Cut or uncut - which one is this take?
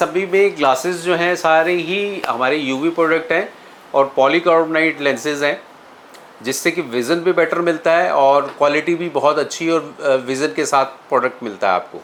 uncut